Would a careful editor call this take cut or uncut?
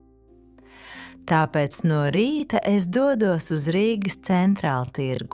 uncut